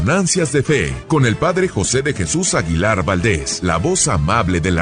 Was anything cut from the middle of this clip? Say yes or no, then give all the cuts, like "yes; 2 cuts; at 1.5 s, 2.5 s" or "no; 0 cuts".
yes; 2 cuts; at 1.0 s, 3.5 s